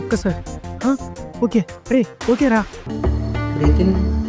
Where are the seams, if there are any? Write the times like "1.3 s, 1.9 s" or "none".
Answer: 2.8 s